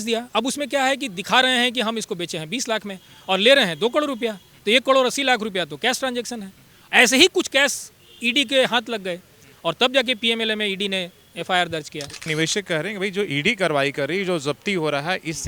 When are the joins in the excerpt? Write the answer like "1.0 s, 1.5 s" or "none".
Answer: 12.3 s